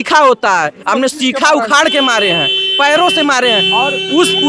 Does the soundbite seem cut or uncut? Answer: uncut